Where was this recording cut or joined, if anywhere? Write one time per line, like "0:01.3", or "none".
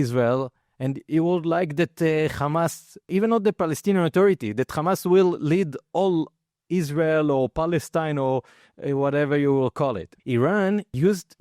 0:03.1
0:10.1